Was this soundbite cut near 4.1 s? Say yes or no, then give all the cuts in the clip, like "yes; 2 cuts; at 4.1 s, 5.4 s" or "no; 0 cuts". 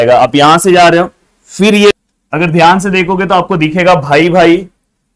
no; 1 cut; at 1.9 s